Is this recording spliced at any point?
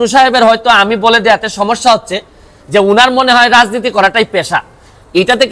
no; 0 cuts

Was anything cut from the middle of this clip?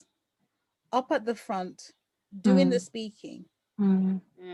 no; 0 cuts

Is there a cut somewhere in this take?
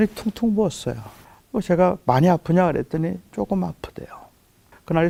no; 0 cuts

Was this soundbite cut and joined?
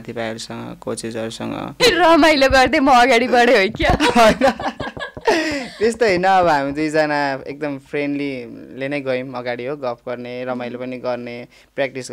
yes; 1 cut; at 1.8 s

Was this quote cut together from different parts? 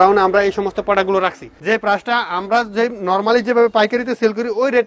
yes; 1 cut; at 1.5 s

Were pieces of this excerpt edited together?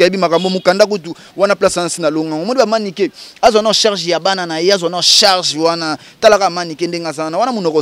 no; 0 cuts

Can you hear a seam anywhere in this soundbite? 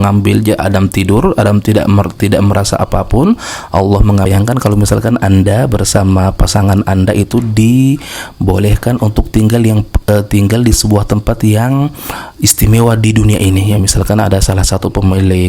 yes; 1 cut; at 4.2 s

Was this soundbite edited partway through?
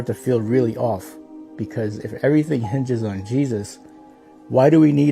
no; 0 cuts

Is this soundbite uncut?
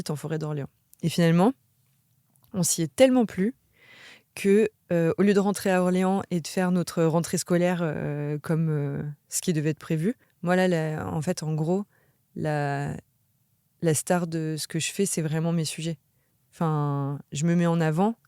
no; 1 cut; at 10.3 s

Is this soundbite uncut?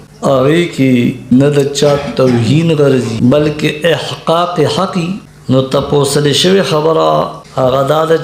no; 2 cuts; at 3.1 s, 5.3 s

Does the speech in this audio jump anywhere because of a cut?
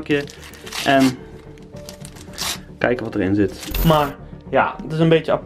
yes; 1 cut; at 3.8 s

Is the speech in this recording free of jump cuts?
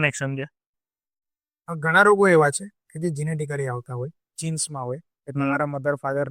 yes; 0 cuts

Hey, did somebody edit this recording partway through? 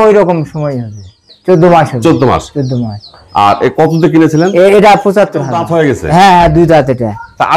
yes; 1 cut; at 5.6 s

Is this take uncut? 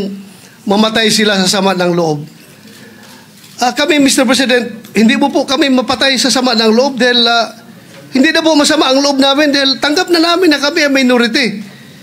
yes; 0 cuts

